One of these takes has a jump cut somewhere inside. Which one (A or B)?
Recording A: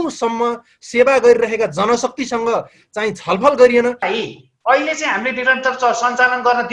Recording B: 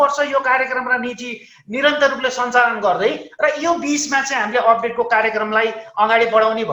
A